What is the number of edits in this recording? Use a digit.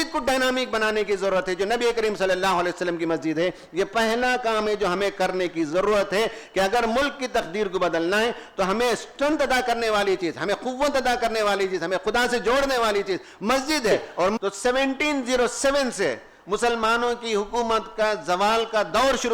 1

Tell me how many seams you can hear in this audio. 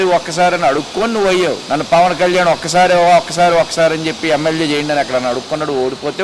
1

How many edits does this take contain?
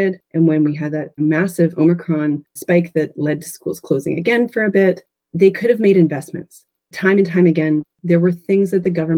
1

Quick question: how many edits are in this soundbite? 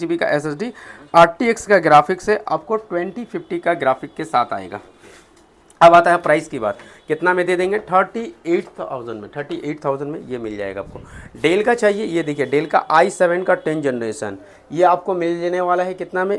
0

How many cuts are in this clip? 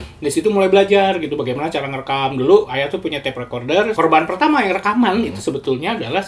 1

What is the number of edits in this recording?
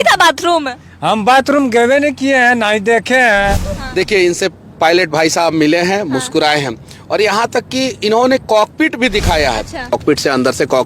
2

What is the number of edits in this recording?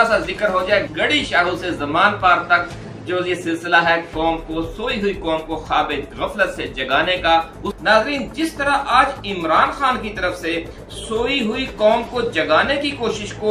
1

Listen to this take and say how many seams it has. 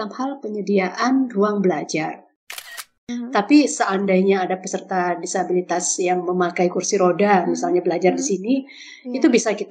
1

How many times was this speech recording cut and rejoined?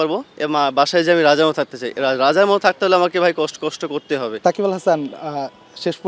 0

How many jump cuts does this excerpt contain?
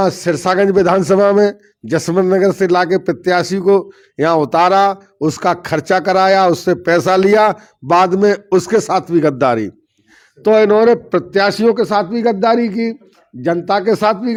0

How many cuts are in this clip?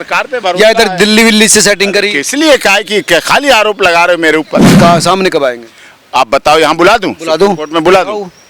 1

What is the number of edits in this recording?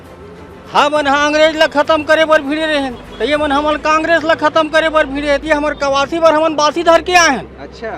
1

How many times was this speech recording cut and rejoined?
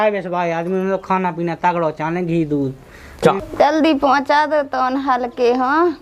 1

